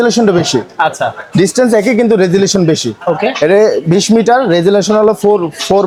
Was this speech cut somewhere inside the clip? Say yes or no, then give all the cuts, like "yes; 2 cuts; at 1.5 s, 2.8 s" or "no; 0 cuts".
no; 0 cuts